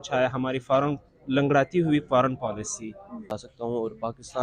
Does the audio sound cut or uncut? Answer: cut